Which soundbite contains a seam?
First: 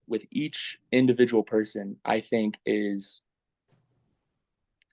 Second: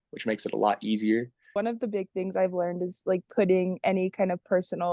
second; 1 cut; at 1.5 s

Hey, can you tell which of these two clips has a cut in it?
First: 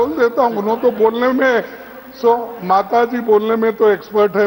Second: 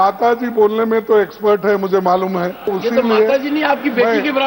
second; 1 cut; at 2.7 s

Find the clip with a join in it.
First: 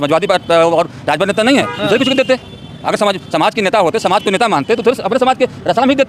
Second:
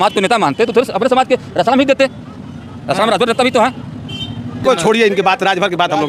second; 1 cut; at 4.6 s

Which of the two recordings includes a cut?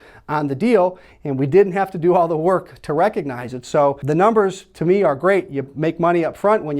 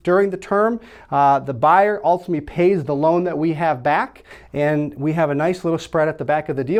first; 1 cut; at 4.0 s

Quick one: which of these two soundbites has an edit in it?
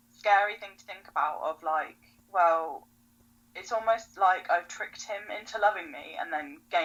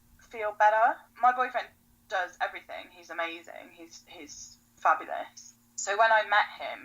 second; 2 cuts; at 1.1 s, 5.4 s

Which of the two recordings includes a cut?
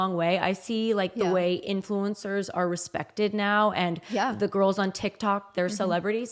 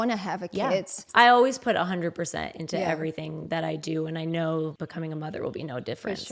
second; 2 cuts; at 1.0 s, 4.8 s

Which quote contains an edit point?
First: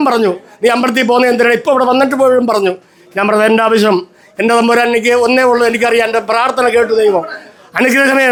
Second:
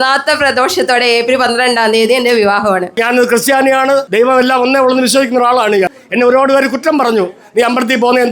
second; 3 cuts; at 3.0 s, 4.1 s, 6.0 s

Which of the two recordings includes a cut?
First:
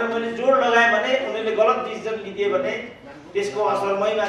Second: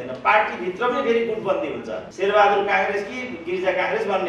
second; 1 cut; at 2.0 s

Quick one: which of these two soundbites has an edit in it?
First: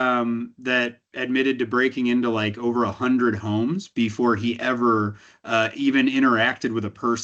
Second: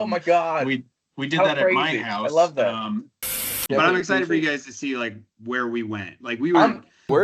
second; 1 cut; at 3.5 s

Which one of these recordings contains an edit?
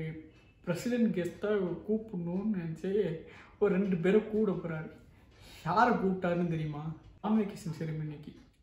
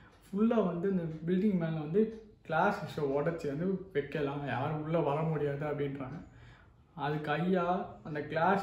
first; 1 cut; at 7.2 s

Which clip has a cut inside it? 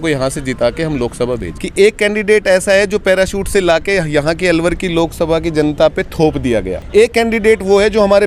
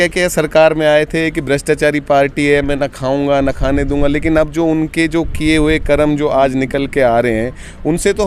first; 2 cuts; at 1.5 s, 6.8 s

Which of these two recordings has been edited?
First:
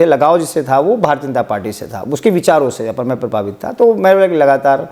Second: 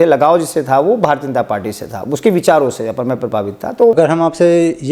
second; 1 cut; at 3.9 s

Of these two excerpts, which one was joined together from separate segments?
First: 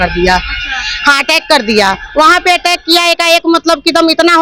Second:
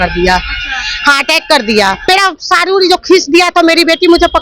second; 1 cut; at 2.1 s

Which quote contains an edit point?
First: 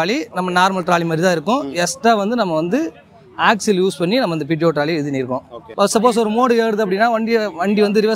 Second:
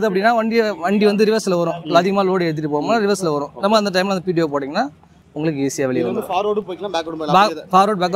first; 1 cut; at 5.6 s

